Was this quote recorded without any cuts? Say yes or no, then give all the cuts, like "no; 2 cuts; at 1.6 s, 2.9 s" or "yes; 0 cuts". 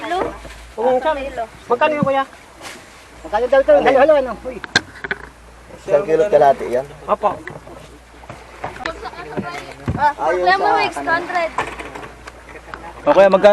no; 1 cut; at 8.8 s